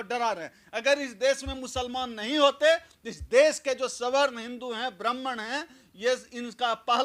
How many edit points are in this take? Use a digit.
0